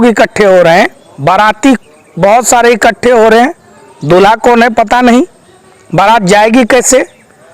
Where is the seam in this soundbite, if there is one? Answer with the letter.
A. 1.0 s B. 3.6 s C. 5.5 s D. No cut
A